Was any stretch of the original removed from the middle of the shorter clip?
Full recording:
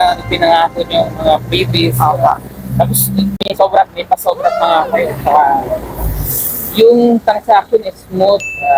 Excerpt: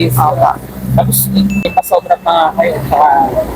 yes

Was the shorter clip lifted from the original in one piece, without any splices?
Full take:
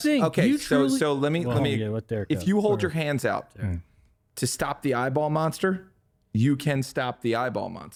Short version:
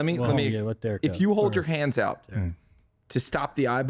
yes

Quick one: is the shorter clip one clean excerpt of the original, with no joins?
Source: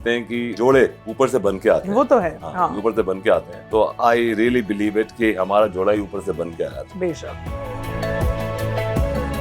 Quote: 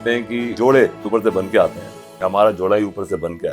no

